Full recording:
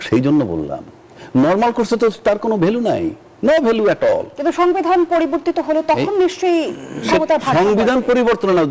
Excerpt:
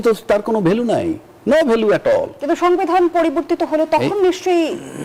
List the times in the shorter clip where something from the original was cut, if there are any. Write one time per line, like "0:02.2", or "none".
none

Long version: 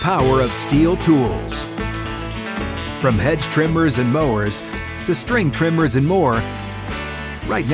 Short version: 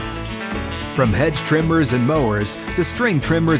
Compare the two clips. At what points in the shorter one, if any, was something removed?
0:02.6

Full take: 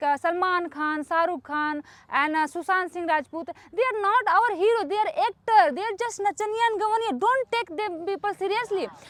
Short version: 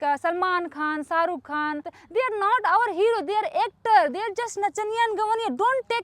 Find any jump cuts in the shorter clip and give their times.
0:01.9

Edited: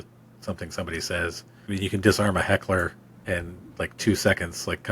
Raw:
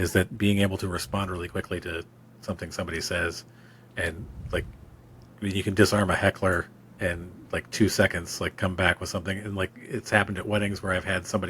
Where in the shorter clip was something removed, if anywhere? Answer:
0:01.5

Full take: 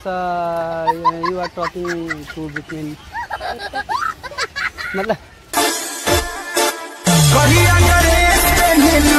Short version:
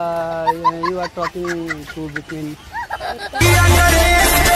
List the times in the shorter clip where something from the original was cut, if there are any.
0:03.4

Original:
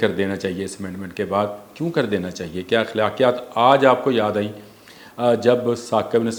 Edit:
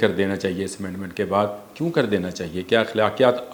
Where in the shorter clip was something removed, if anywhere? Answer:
none

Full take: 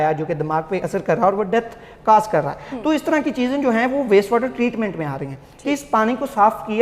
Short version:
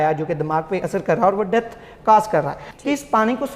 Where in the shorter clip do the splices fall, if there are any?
0:02.6

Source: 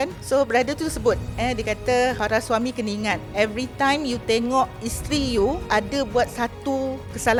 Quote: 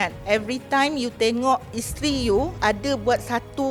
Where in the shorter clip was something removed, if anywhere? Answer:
none

